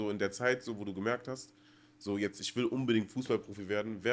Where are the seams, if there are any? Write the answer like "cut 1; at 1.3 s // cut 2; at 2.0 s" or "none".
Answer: none